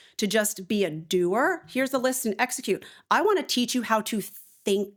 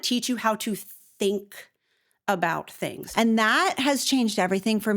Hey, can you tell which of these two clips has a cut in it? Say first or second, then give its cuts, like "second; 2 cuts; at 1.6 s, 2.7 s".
second; 1 cut; at 3.1 s